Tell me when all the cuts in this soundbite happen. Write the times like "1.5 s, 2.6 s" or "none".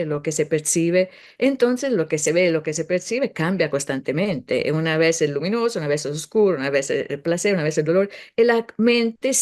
none